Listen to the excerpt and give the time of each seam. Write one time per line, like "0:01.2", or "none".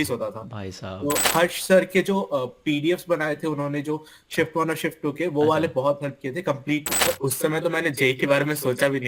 0:01.2
0:07.0